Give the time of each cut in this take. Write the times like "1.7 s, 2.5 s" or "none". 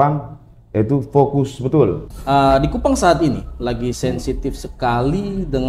2.1 s